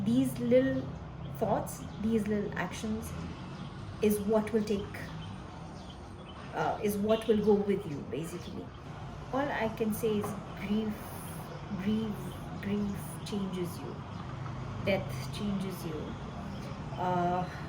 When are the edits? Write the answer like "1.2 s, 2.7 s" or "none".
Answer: 8.8 s